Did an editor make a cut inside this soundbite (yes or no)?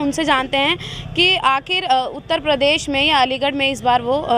no